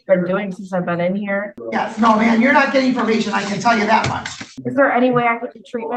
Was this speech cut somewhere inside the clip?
yes; 2 cuts; at 1.6 s, 4.5 s

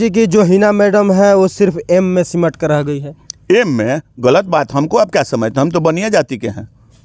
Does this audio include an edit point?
no; 0 cuts

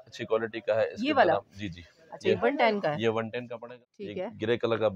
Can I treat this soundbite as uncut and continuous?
no; 1 cut; at 3.5 s

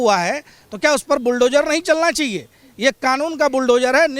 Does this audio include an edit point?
no; 0 cuts

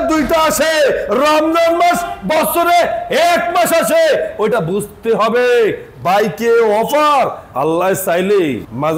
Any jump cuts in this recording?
no; 0 cuts

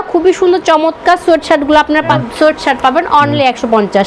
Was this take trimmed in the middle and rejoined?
yes; 1 cut; at 2.2 s

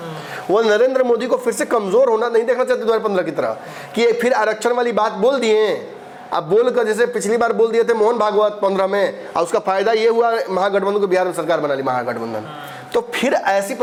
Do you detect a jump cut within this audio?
no; 0 cuts

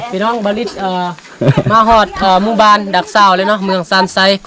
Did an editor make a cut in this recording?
no; 0 cuts

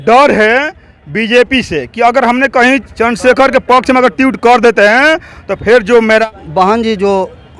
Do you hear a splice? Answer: yes; 1 cut; at 6.2 s

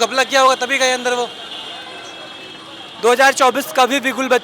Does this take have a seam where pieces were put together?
no; 0 cuts

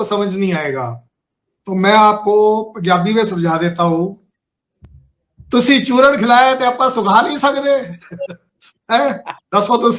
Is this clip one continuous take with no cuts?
yes; 0 cuts

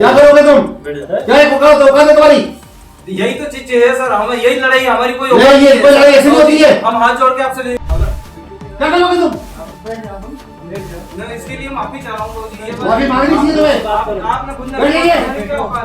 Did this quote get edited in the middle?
no; 0 cuts

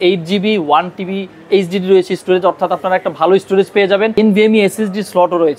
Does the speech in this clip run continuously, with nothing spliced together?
no; 1 cut; at 4.1 s

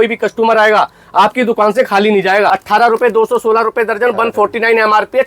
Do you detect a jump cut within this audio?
yes; 1 cut; at 2.5 s

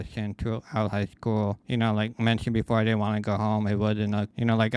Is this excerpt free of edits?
yes; 0 cuts

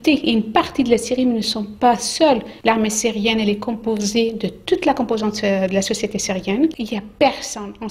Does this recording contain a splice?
yes; 2 cuts; at 2.5 s, 6.8 s

